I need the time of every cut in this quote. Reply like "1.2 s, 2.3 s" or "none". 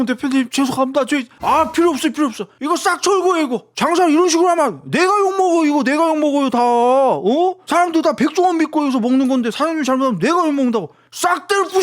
1.3 s, 3.6 s